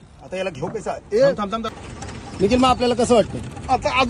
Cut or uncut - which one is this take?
cut